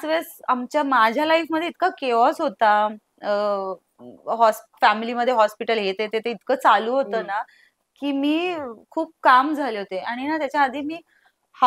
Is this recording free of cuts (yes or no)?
yes